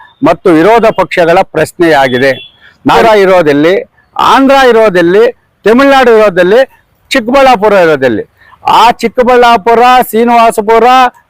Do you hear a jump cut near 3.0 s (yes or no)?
yes